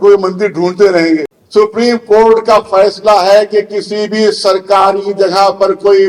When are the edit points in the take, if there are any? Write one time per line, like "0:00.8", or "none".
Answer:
0:01.4